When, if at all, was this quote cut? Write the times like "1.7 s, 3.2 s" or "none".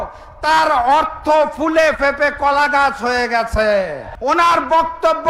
4.0 s